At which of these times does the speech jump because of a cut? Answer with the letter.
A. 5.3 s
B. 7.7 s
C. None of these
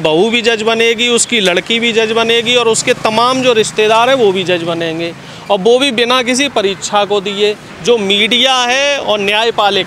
B